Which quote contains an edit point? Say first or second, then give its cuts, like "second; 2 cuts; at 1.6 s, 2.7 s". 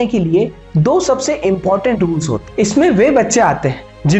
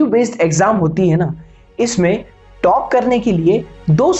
first; 1 cut; at 2.4 s